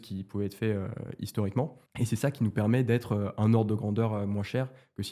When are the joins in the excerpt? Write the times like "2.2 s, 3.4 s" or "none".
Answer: 1.8 s